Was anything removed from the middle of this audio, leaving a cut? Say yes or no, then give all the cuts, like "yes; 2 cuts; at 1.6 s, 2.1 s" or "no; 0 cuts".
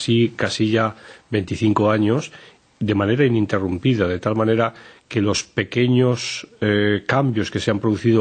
no; 0 cuts